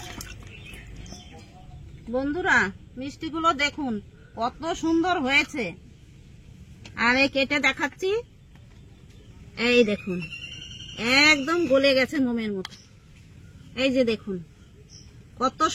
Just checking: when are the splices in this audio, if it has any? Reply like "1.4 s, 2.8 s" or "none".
1.5 s